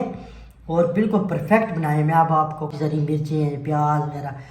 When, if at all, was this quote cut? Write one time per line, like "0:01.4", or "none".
0:02.7